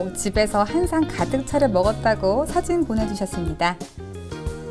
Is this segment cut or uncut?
cut